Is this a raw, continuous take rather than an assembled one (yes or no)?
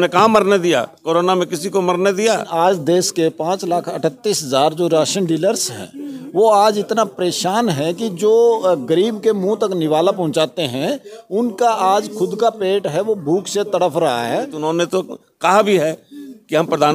no